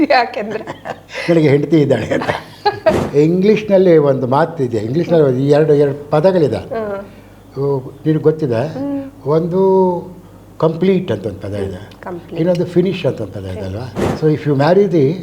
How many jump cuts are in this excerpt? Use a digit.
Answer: 2